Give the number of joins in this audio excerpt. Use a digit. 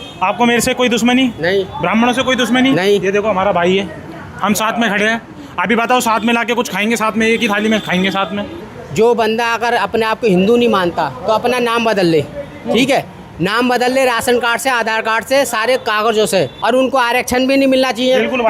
2